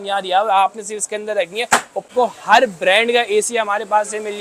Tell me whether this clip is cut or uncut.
cut